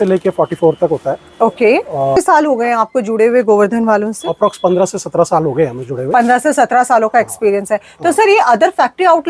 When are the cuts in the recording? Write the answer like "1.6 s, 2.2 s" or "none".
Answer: 2.2 s